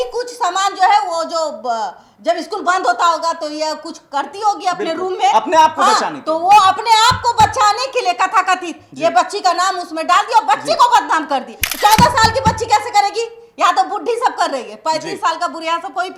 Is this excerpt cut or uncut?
uncut